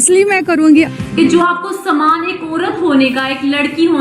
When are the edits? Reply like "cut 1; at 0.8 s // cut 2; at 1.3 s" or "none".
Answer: cut 1; at 0.9 s